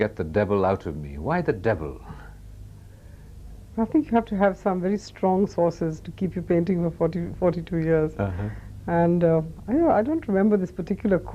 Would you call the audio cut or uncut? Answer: uncut